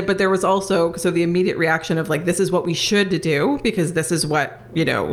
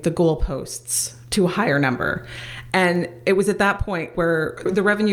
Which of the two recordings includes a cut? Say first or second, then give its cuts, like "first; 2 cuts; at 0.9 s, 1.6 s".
second; 1 cut; at 4.1 s